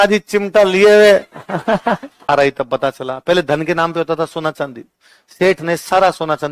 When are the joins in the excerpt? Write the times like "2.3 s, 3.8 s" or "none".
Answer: 2.3 s